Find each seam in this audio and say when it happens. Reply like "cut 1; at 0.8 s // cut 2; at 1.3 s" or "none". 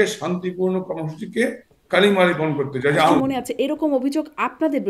cut 1; at 3.2 s